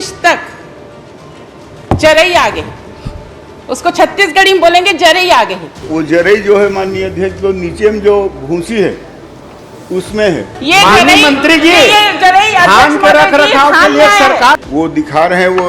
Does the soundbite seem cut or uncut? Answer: cut